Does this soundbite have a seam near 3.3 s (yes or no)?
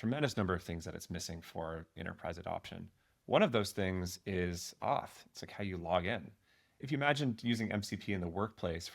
no